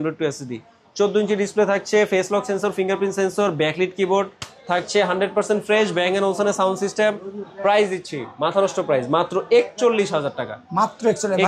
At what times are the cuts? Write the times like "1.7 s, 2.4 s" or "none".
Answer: none